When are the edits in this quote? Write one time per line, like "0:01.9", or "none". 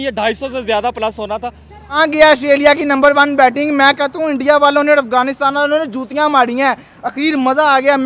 0:02.0